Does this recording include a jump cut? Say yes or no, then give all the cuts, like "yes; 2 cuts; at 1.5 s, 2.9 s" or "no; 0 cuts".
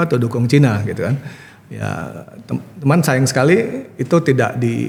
no; 0 cuts